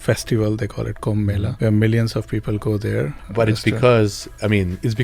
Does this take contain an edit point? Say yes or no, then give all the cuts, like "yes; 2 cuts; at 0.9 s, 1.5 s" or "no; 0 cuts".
yes; 2 cuts; at 1.5 s, 3.6 s